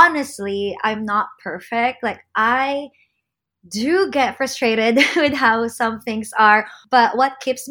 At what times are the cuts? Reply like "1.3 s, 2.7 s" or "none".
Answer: 6.8 s